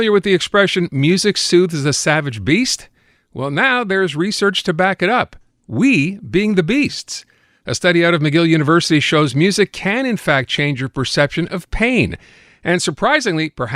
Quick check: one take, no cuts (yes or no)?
yes